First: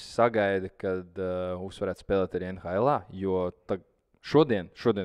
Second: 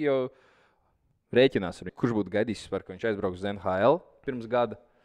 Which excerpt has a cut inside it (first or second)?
second